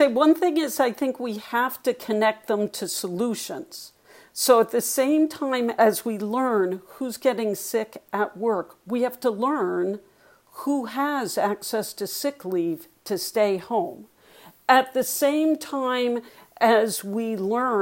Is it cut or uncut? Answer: uncut